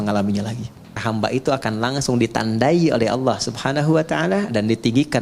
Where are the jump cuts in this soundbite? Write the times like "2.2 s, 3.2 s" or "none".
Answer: 1.0 s

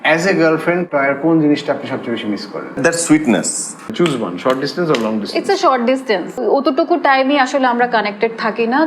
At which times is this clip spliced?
0.9 s, 2.8 s, 3.9 s, 6.4 s

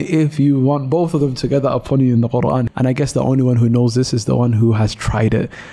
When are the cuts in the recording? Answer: 2.7 s

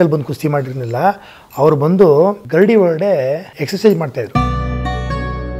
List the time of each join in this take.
2.4 s, 3.5 s, 4.3 s

